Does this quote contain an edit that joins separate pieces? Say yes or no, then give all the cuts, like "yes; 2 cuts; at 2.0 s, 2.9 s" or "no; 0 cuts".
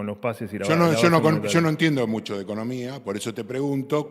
no; 0 cuts